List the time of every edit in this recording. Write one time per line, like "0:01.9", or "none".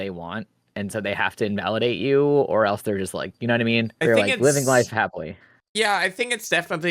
none